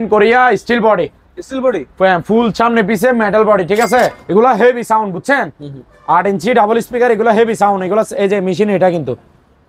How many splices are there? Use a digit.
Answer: 1